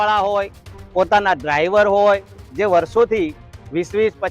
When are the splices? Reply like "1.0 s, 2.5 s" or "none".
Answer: 2.4 s